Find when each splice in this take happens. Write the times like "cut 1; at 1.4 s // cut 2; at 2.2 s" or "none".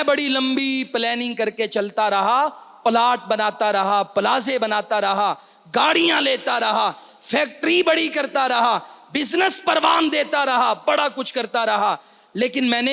none